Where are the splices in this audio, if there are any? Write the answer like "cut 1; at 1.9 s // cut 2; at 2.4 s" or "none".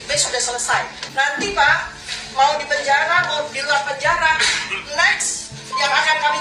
cut 1; at 1.0 s